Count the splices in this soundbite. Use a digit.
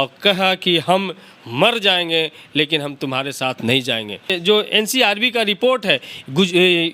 1